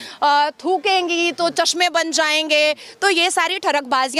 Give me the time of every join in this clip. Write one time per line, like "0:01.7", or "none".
none

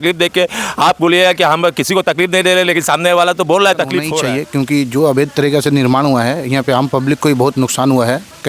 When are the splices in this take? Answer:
0:04.1

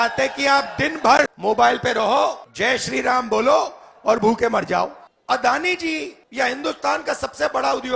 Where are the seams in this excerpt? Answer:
0:01.3
0:02.5
0:05.1
0:06.2

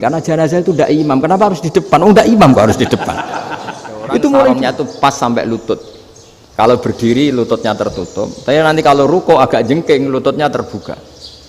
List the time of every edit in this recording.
0:04.6

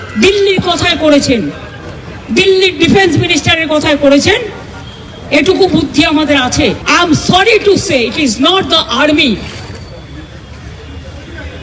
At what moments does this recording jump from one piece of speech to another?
0:06.8

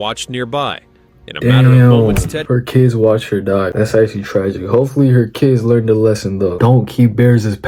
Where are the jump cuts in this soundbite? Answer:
0:03.7
0:06.6

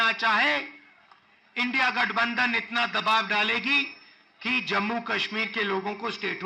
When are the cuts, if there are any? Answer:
none

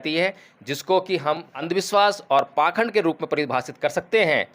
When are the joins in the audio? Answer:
0:01.6

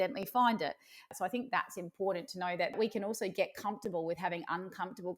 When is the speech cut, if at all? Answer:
0:01.1
0:02.8

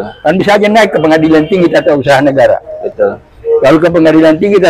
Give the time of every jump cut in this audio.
none

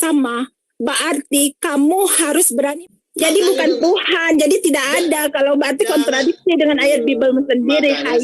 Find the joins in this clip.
0:02.7

